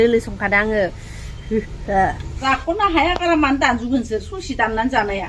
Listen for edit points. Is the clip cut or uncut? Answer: cut